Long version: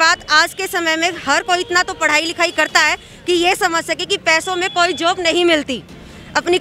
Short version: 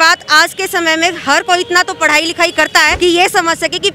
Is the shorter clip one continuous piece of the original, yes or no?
no